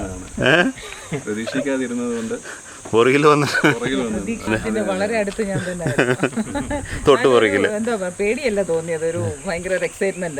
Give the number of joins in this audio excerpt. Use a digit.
1